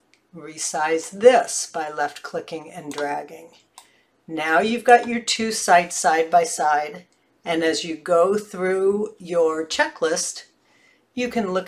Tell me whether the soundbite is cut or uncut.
uncut